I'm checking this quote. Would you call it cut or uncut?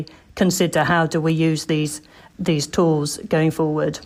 uncut